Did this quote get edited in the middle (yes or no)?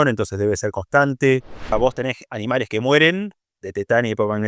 yes